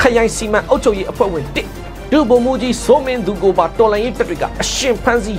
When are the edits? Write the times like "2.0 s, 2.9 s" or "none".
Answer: none